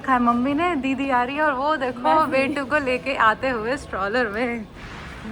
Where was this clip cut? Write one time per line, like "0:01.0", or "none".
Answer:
none